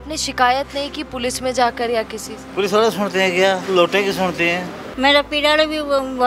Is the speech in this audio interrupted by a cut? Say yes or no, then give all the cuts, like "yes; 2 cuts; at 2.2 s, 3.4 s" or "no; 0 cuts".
yes; 1 cut; at 4.8 s